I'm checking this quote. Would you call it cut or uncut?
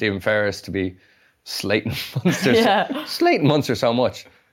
uncut